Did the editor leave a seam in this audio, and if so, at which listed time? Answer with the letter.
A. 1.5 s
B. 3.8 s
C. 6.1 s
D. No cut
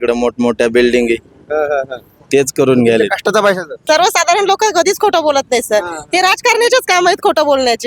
B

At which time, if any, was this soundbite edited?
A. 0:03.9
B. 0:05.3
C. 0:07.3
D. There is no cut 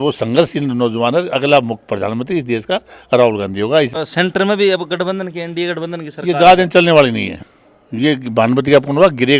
A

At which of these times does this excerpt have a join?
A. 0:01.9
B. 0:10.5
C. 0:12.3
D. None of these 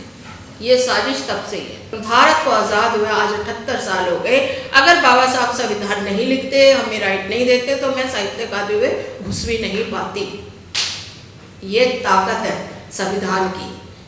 A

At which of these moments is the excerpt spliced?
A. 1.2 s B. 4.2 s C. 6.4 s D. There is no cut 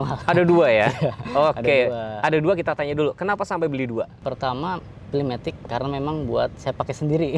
B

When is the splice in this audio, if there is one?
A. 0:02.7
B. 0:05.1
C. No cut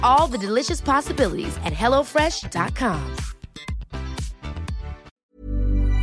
B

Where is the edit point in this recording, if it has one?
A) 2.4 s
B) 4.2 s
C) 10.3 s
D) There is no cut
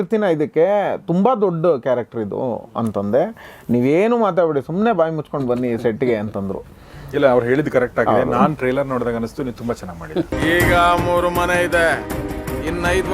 C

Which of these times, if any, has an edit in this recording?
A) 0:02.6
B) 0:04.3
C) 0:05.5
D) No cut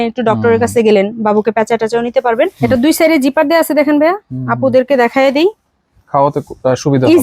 A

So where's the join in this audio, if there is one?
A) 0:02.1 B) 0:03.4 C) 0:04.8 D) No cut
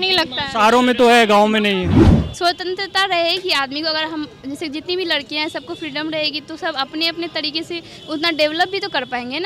A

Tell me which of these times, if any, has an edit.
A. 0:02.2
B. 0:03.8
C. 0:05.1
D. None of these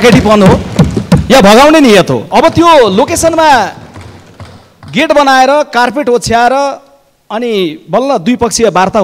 A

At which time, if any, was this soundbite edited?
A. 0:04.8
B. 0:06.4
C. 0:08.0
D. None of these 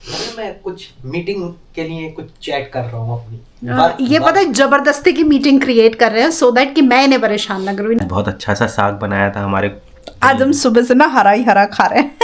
C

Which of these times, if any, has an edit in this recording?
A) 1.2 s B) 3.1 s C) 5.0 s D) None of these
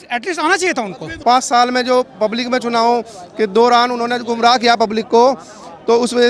A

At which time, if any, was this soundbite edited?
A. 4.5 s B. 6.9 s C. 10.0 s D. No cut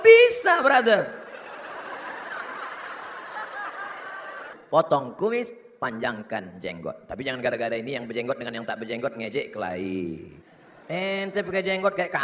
A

